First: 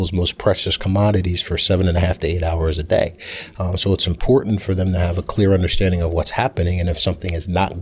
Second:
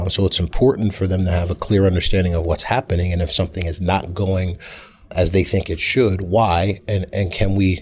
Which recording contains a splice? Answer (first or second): second